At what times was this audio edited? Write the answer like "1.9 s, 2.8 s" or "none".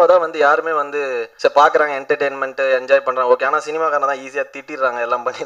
1.2 s

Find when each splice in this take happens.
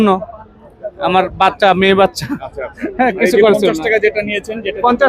none

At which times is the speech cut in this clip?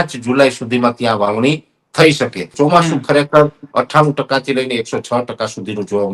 2.4 s

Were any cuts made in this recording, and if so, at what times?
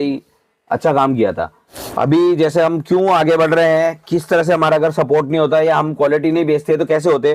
1.8 s

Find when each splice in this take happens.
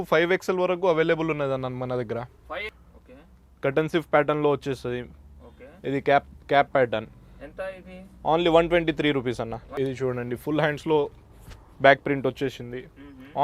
2.7 s, 9.6 s

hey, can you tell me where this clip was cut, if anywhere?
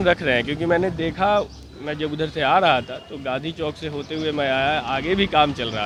none

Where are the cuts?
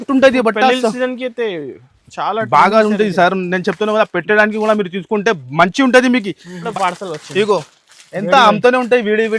6.6 s

